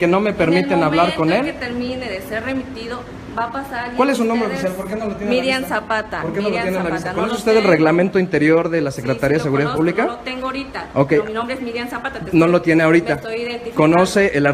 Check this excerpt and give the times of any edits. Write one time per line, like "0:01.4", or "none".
none

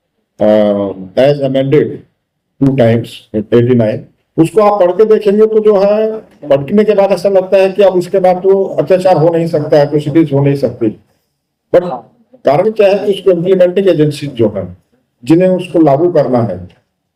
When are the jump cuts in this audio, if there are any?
none

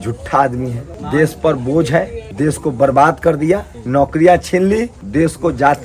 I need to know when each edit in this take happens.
0:00.9
0:02.2
0:03.7
0:05.0

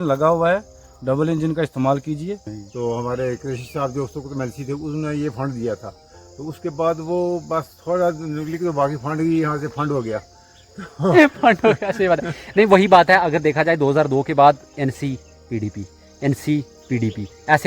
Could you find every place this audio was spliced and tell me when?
0:02.6

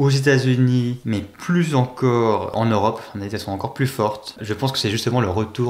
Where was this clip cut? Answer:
0:01.0
0:02.5
0:04.4

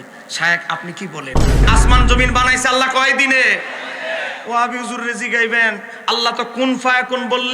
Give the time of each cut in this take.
0:01.6

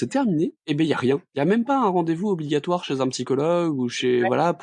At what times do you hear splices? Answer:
0:01.3

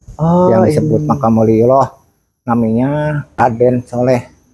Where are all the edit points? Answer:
0:03.4

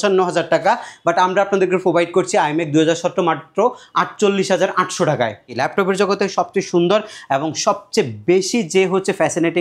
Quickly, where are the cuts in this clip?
0:05.6

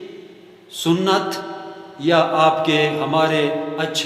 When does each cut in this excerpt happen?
none

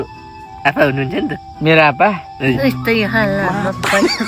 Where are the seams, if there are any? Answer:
0:02.6

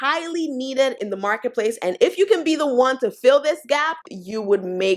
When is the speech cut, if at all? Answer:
0:00.9
0:04.0

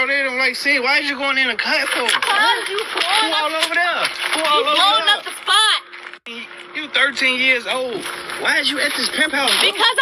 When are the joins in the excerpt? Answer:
0:06.3

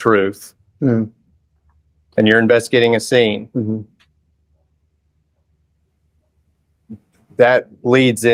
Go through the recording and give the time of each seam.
none

